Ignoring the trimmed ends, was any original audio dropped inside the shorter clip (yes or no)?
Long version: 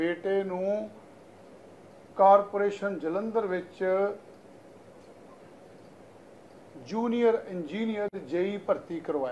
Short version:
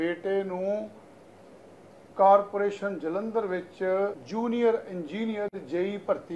yes